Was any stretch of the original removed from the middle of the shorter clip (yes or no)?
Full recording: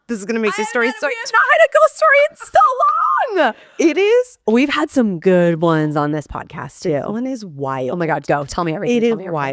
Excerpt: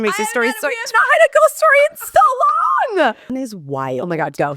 yes